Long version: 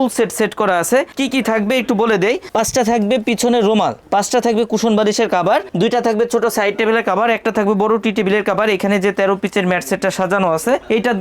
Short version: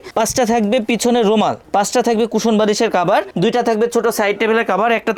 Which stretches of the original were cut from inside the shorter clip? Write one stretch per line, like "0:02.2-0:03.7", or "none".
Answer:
none